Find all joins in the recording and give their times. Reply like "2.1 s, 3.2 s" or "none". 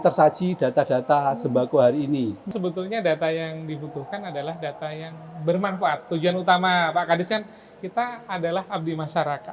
2.5 s